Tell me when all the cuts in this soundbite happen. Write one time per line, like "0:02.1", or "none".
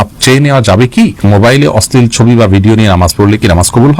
0:01.2